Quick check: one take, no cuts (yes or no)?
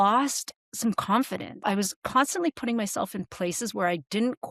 no